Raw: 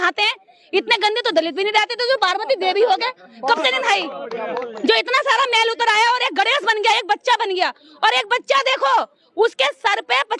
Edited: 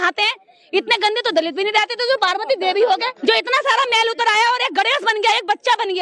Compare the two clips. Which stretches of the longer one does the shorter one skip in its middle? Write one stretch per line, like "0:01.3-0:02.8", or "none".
0:03.1-0:04.7